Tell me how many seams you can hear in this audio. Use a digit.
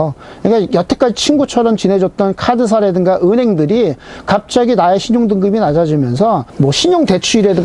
0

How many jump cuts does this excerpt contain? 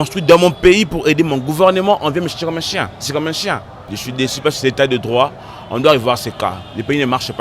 1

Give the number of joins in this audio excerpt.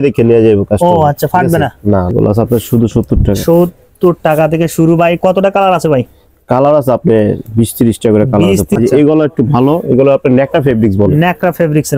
2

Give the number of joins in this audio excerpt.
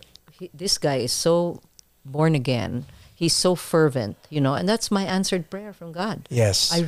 0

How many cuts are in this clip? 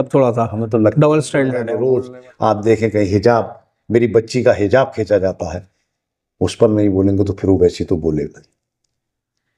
1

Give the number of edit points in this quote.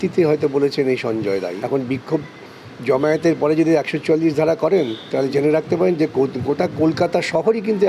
1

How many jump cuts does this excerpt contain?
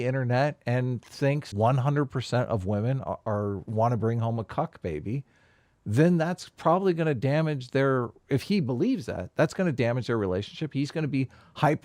1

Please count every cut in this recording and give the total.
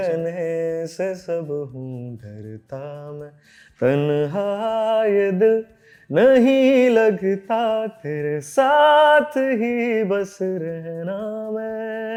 0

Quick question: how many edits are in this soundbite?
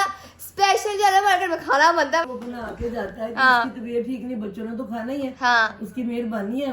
1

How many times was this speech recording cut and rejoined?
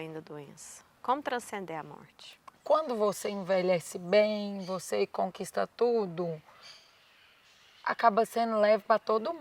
1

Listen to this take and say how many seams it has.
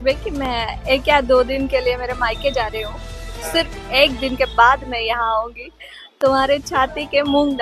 0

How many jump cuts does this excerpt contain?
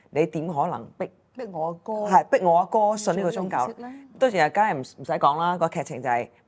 0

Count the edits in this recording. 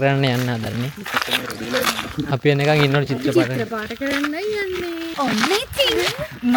0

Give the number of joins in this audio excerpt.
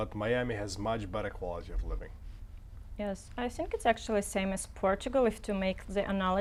0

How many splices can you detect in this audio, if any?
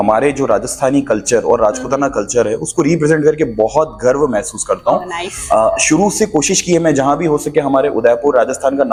0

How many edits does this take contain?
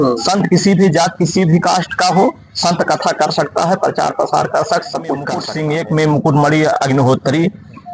1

